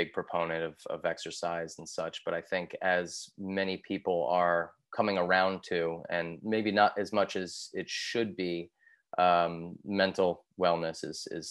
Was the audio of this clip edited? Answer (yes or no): no